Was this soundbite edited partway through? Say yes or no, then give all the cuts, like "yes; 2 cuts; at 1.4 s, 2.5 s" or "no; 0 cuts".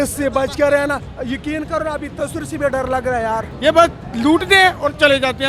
yes; 2 cuts; at 1.1 s, 3.5 s